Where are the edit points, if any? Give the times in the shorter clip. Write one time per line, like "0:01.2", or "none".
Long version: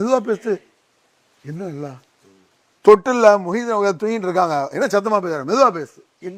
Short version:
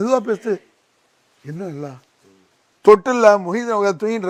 none

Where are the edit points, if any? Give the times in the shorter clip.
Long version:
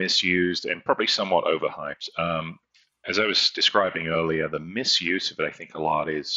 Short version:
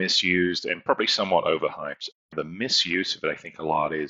0:02.3

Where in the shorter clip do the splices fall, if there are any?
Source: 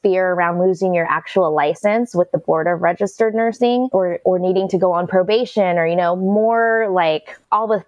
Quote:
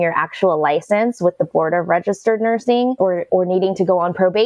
none

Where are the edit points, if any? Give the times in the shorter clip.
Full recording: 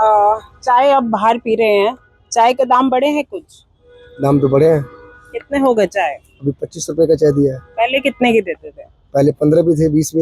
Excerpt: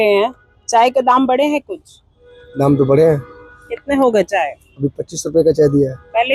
none

